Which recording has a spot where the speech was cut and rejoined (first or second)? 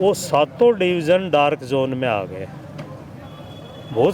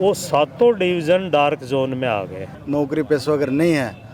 second